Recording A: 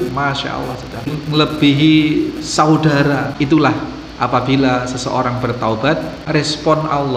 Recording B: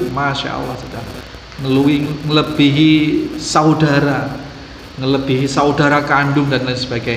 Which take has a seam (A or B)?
A